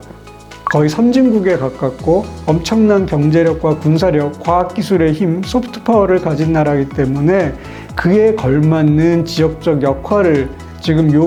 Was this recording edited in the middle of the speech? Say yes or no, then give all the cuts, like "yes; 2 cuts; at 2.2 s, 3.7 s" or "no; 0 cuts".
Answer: no; 0 cuts